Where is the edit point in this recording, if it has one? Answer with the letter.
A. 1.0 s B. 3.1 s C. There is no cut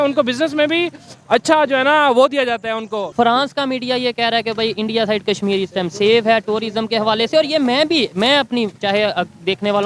B